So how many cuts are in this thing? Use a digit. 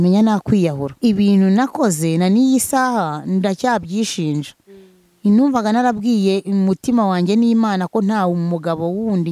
1